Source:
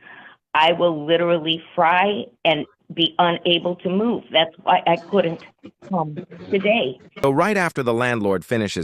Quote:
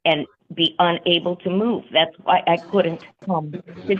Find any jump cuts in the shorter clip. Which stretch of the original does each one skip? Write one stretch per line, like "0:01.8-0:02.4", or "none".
0:05.5-0:05.7